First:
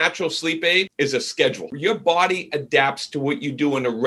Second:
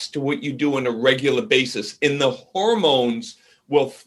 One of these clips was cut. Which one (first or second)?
first